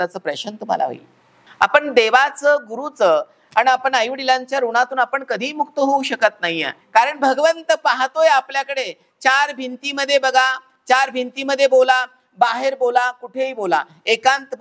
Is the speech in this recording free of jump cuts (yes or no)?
no